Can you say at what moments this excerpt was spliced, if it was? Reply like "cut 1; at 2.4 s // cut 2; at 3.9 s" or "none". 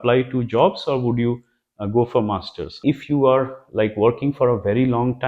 cut 1; at 2.8 s